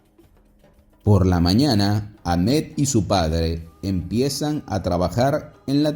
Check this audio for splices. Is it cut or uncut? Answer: cut